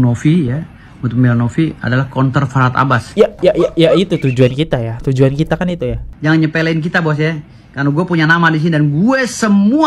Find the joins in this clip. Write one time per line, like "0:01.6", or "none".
0:06.0